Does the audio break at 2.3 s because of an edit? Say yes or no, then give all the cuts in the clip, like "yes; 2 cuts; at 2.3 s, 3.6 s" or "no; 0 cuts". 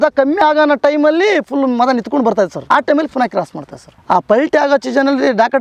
no; 1 cut; at 3.9 s